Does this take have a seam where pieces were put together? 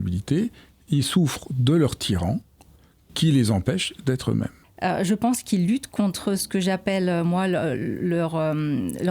yes; 1 cut; at 4.6 s

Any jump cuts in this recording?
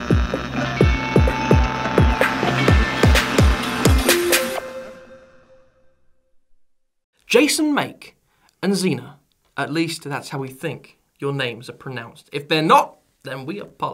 yes; 1 cut; at 8.7 s

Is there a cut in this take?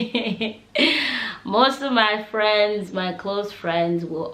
no; 0 cuts

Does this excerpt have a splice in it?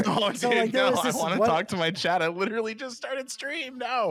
no; 0 cuts

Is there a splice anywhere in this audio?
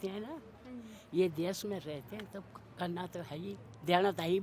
no; 0 cuts

